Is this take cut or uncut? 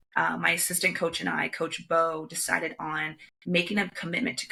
uncut